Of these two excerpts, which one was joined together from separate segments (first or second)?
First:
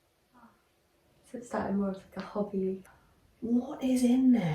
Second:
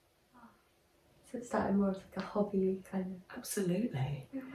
first